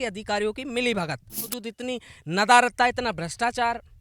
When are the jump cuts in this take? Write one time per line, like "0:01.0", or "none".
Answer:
0:01.6

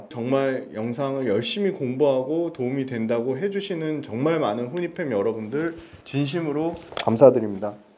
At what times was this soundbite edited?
none

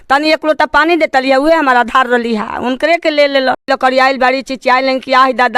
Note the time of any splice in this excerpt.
0:03.6

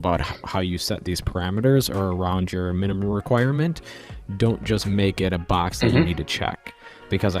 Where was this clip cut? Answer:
none

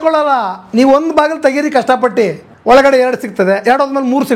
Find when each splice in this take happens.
0:02.5

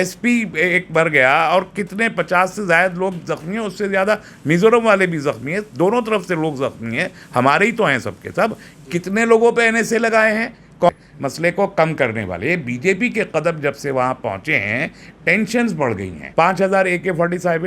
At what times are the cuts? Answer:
0:10.9
0:16.2

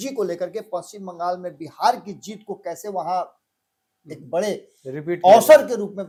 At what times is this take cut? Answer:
none

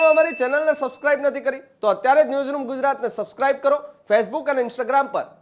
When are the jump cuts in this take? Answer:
none

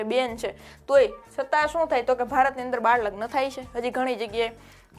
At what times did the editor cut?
none

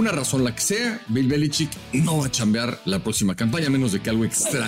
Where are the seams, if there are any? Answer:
0:01.8
0:02.8

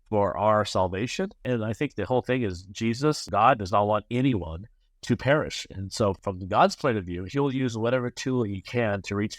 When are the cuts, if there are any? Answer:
0:01.4
0:03.2
0:06.2

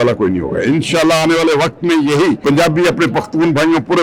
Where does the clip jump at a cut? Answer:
0:02.4

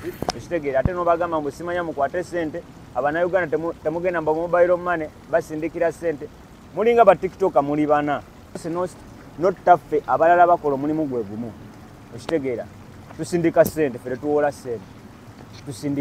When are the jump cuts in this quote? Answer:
0:08.6

